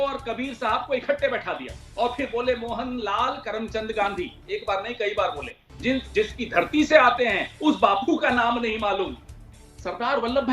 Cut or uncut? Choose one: cut